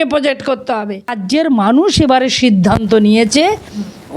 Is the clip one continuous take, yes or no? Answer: no